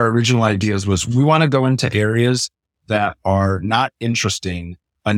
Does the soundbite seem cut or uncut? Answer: cut